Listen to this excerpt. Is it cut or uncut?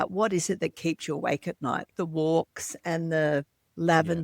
cut